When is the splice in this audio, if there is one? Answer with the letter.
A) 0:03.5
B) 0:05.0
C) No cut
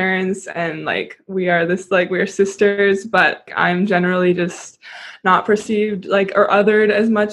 A